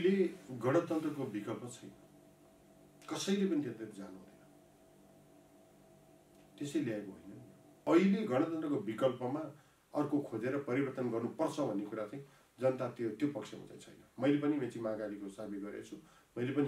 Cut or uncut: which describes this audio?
cut